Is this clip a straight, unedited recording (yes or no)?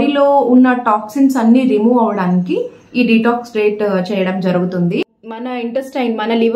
no